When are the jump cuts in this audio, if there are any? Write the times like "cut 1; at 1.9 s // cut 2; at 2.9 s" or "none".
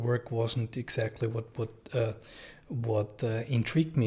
none